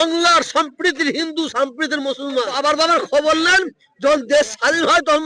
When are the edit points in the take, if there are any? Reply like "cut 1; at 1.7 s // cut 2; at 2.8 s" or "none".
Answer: cut 1; at 2.5 s